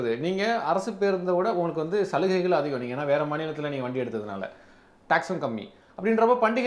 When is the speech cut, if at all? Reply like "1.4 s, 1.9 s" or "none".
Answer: none